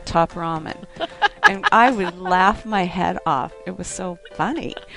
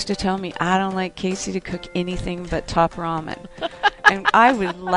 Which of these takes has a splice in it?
first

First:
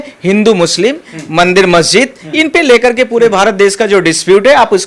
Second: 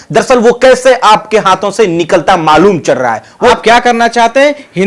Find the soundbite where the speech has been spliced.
second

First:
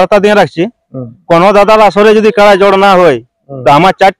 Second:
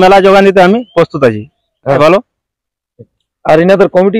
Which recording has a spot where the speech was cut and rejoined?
second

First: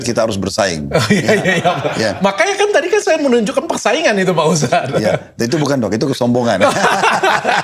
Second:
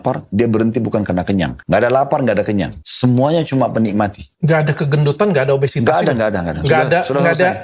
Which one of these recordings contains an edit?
second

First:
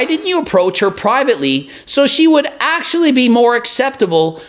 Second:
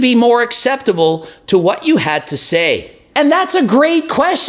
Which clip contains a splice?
second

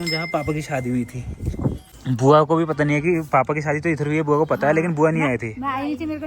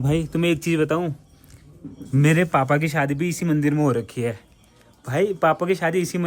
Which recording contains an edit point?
first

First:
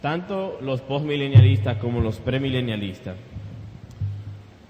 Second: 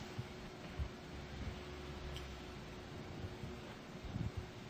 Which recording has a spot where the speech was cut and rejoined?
first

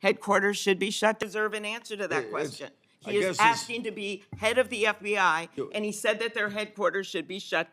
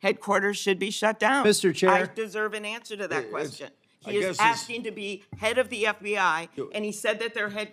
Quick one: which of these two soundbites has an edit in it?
first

